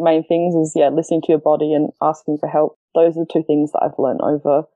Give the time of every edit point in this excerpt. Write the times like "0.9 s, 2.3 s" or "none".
2.8 s